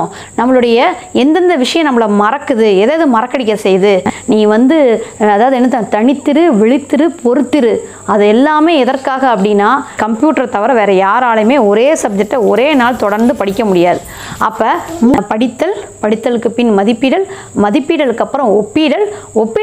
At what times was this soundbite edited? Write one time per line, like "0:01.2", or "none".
0:04.1
0:10.0
0:15.1

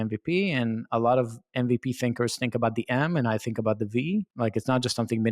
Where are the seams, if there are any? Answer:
0:04.3

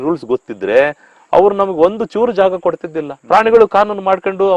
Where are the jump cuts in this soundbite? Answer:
none

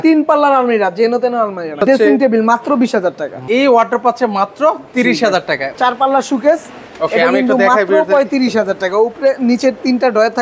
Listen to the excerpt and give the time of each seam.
0:01.8
0:03.3
0:05.7

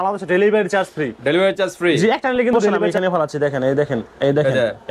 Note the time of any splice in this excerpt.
0:02.8

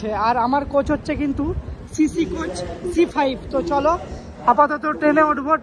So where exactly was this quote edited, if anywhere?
none

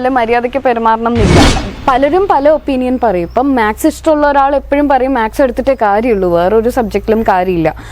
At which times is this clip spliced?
0:01.7

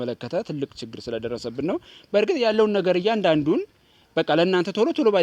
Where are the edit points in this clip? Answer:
none

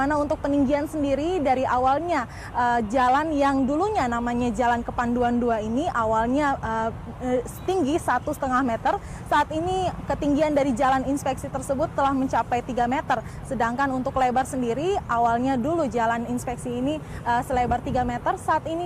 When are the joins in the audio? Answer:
0:12.8

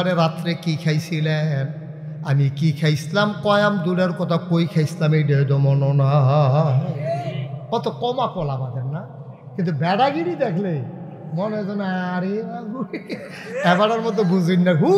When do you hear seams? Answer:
0:07.5

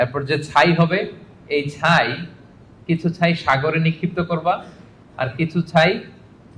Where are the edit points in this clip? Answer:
none

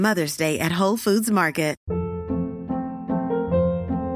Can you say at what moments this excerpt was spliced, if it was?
0:01.8

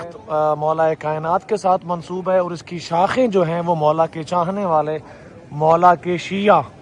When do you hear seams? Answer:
none

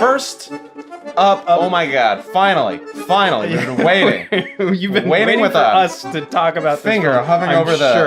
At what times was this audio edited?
0:01.6

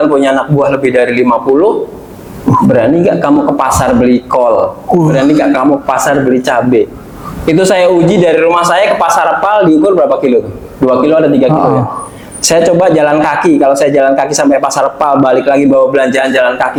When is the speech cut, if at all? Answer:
none

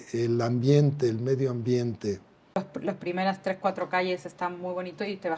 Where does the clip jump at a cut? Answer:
0:02.6

